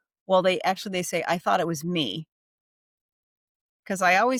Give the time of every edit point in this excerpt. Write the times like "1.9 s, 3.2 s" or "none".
none